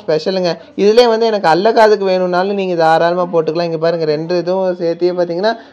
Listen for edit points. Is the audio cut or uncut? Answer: uncut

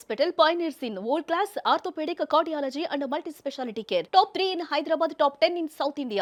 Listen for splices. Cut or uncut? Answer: uncut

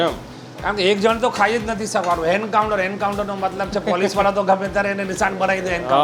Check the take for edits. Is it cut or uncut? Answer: uncut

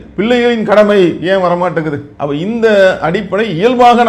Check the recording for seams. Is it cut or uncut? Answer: uncut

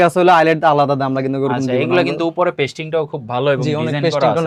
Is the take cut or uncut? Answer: uncut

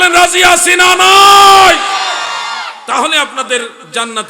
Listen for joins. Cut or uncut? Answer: uncut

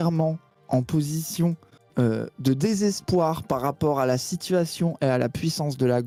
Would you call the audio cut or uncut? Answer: uncut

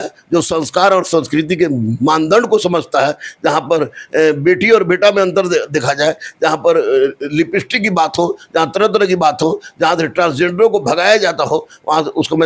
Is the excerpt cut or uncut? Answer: uncut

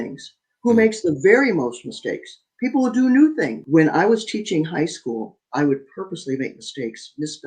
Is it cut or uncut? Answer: cut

